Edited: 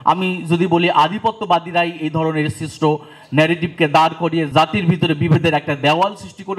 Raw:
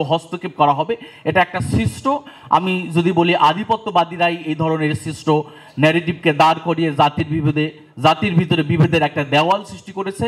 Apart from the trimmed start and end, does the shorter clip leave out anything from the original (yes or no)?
yes